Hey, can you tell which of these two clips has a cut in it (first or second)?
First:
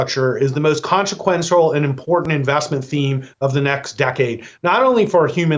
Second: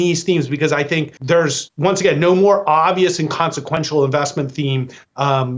second